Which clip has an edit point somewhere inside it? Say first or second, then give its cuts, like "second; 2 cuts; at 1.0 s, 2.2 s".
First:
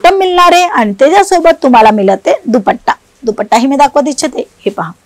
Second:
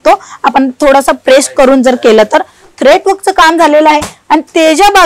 second; 1 cut; at 2.6 s